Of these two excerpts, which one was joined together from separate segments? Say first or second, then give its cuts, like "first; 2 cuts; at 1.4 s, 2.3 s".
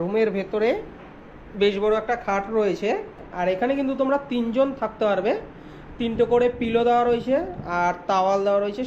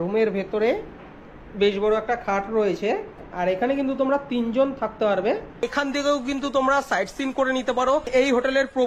second; 1 cut; at 5.7 s